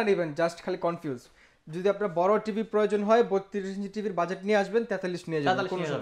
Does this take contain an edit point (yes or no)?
no